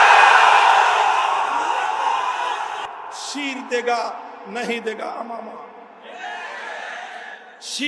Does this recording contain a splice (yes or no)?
yes